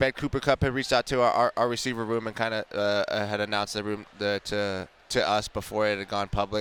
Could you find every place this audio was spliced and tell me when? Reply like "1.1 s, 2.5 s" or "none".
none